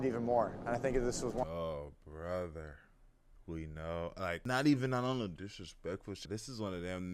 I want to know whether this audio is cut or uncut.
cut